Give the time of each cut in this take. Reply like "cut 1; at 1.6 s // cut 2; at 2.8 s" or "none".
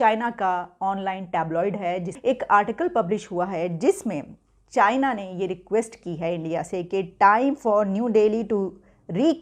cut 1; at 2.1 s